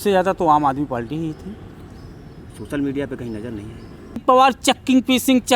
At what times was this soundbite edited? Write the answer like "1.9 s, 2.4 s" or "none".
4.2 s